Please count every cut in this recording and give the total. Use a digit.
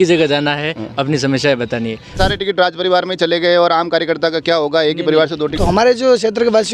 2